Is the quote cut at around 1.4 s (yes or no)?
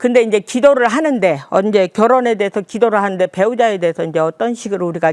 no